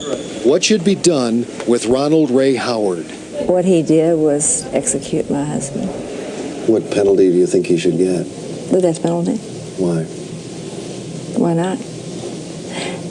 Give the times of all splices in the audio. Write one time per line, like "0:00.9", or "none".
0:06.5